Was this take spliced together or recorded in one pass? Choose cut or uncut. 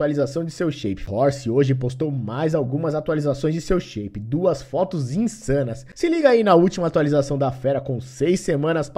cut